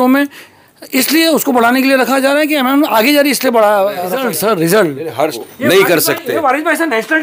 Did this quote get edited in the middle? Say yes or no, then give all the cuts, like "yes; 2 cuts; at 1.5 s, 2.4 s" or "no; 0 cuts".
yes; 2 cuts; at 4.1 s, 5.4 s